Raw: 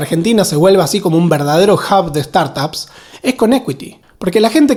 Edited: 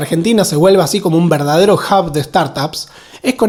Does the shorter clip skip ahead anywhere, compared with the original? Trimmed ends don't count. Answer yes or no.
no